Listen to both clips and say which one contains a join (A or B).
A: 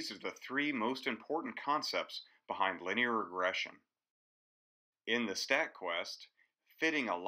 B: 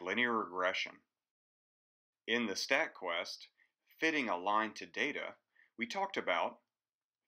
A